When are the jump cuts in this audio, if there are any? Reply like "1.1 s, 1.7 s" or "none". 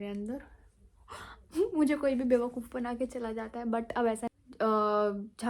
4.2 s